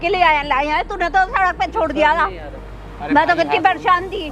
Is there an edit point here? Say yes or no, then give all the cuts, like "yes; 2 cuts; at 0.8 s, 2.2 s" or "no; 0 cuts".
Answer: no; 0 cuts